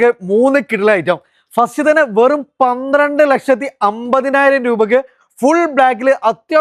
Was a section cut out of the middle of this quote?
no; 0 cuts

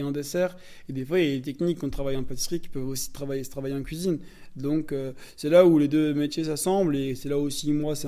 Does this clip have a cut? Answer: no; 0 cuts

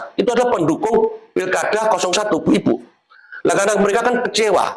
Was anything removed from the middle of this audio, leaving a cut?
no; 0 cuts

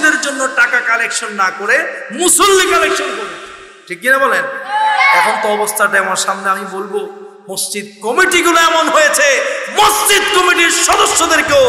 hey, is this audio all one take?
yes; 0 cuts

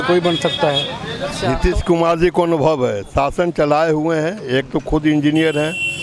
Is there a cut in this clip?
yes; 1 cut; at 1.3 s

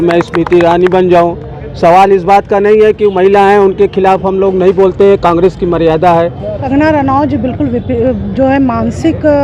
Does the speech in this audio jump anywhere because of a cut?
yes; 1 cut; at 6.5 s

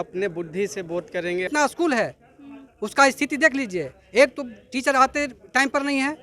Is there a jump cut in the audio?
yes; 1 cut; at 1.5 s

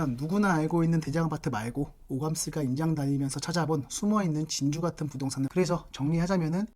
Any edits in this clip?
yes; 1 cut; at 5.5 s

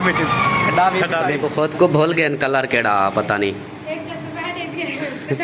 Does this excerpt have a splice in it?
yes; 1 cut; at 1.4 s

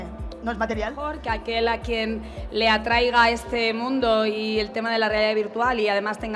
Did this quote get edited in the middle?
yes; 1 cut; at 1.2 s

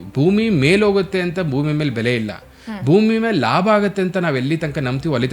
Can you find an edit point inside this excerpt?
no; 0 cuts

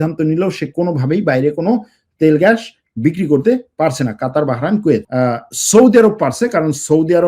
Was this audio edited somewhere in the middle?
yes; 1 cut; at 5.1 s

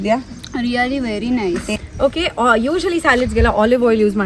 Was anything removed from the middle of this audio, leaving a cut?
yes; 1 cut; at 1.6 s

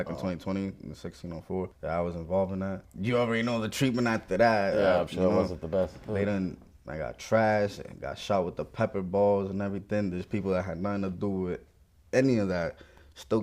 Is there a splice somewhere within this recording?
no; 0 cuts

